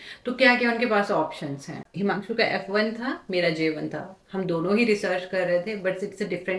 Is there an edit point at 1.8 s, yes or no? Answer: yes